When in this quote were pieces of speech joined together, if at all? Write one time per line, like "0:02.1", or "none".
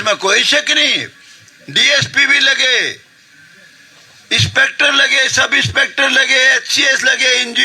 none